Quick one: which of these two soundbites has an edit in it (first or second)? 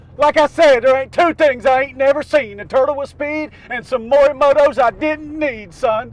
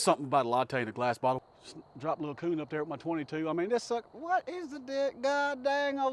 second